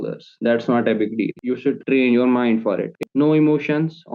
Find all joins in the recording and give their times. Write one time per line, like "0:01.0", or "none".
0:01.3
0:03.0

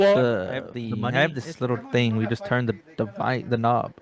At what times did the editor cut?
0:00.9

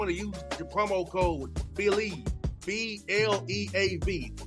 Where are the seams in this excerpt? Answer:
none

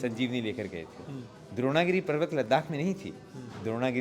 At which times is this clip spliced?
none

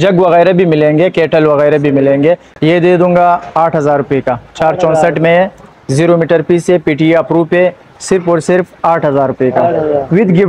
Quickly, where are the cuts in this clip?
0:02.5

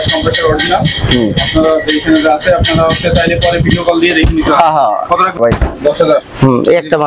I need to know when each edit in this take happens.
0:05.6

